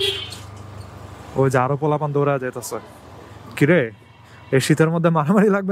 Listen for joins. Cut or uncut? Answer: uncut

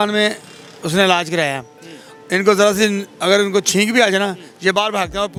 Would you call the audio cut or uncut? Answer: uncut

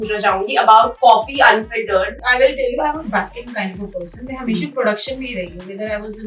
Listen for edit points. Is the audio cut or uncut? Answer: cut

